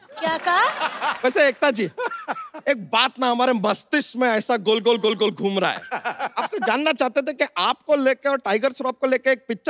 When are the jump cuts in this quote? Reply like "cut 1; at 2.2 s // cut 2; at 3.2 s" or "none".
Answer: cut 1; at 1.2 s